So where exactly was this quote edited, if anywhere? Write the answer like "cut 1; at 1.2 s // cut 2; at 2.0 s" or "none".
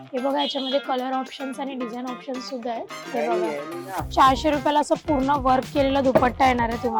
cut 1; at 3.0 s